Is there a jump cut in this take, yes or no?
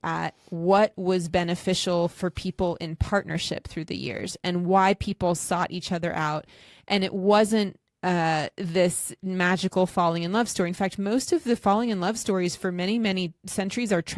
no